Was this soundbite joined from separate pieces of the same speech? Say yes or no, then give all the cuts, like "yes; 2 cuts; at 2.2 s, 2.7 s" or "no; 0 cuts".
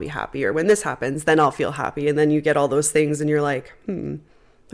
no; 0 cuts